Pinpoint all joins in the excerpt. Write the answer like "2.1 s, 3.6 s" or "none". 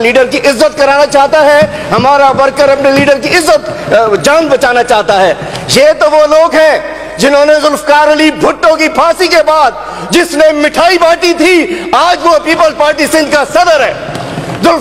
none